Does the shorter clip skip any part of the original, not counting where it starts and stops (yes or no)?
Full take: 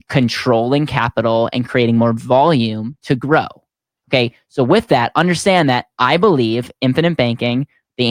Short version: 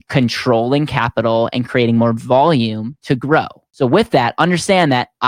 yes